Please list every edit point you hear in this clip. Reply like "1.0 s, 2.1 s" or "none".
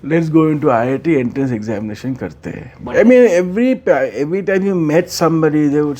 2.8 s

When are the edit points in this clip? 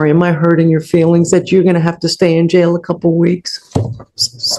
none

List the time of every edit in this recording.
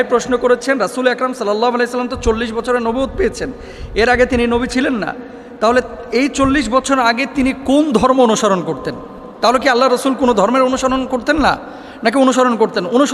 none

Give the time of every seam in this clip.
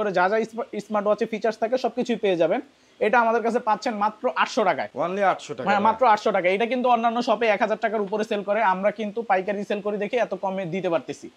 none

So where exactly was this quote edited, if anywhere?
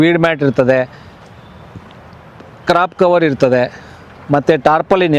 none

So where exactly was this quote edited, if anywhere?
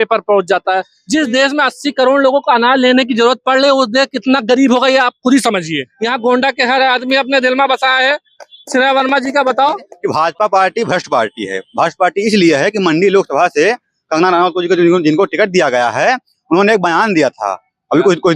1.0 s, 5.9 s, 9.9 s

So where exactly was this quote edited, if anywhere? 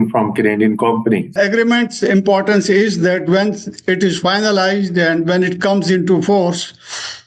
1.3 s

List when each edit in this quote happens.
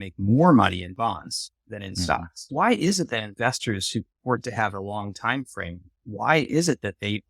2.3 s

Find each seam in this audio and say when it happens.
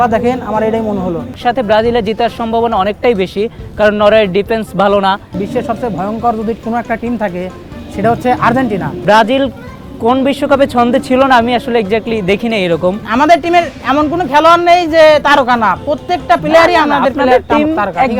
1.3 s, 5.4 s, 9.0 s, 13.0 s

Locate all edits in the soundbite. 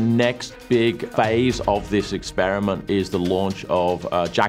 1.1 s

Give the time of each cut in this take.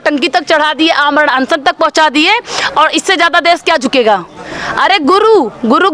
none

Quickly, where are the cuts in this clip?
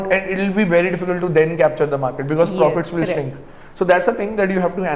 none

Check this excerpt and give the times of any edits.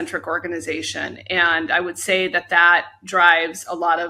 none

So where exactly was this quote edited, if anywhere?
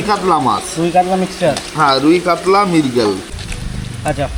3.2 s

